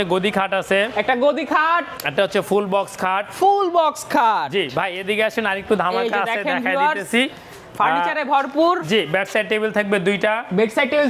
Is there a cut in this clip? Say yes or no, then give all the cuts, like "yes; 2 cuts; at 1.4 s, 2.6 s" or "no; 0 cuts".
no; 0 cuts